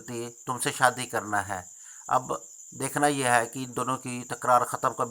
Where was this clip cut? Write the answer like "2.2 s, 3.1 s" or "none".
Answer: none